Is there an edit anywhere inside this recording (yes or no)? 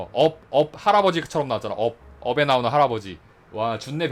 no